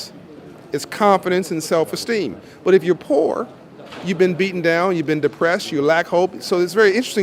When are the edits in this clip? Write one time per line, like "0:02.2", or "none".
none